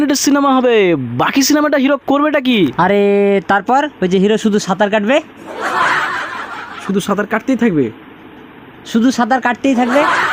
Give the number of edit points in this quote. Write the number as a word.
zero